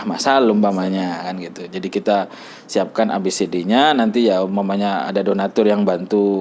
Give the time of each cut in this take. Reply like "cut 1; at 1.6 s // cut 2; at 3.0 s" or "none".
none